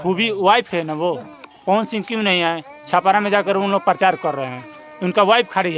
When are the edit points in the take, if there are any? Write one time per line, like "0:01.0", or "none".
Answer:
none